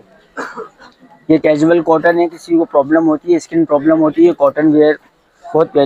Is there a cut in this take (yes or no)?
no